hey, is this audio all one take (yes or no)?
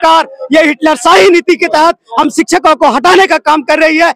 yes